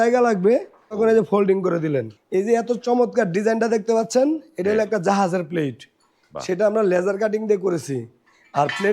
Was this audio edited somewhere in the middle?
yes; 2 cuts; at 1.0 s, 2.2 s

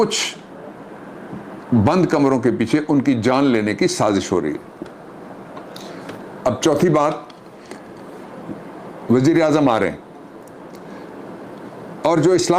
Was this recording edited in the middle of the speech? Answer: no; 0 cuts

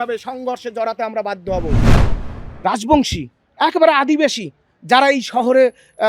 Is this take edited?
yes; 1 cut; at 2.0 s

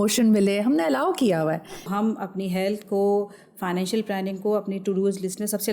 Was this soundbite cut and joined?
yes; 1 cut; at 1.9 s

